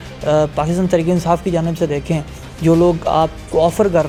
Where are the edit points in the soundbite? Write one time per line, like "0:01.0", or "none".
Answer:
none